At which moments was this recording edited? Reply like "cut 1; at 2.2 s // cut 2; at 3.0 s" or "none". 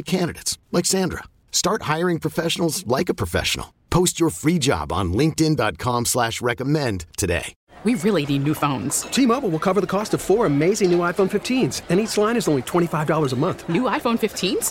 cut 1; at 7.6 s